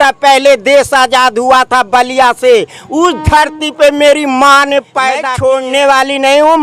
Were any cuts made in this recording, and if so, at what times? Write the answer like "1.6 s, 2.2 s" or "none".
5.3 s